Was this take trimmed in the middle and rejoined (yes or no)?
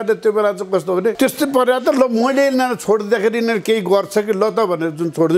yes